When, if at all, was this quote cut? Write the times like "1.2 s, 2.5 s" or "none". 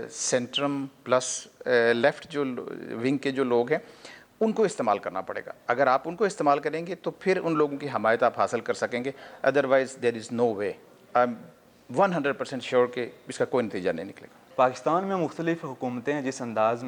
none